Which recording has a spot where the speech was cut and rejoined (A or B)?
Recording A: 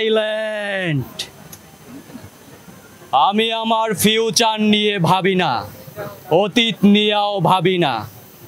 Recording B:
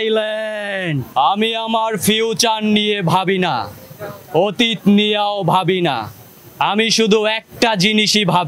B